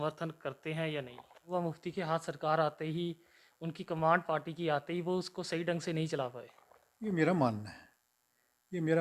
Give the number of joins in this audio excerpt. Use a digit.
1